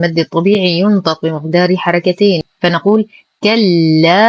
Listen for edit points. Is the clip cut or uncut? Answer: cut